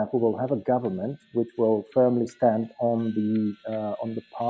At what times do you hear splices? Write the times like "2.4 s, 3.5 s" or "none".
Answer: none